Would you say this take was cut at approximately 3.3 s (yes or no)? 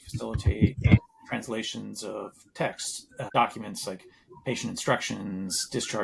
yes